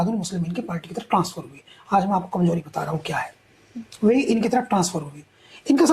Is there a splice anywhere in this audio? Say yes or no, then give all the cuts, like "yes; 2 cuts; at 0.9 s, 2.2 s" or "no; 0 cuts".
no; 0 cuts